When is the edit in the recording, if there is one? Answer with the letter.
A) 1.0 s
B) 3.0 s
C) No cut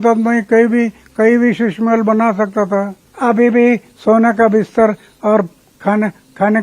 B